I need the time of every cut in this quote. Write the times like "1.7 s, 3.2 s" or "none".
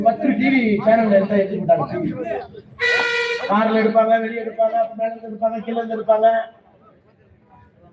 none